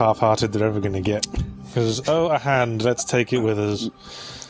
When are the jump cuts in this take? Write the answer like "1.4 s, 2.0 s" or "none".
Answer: 3.3 s